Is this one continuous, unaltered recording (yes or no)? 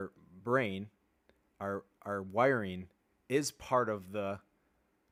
yes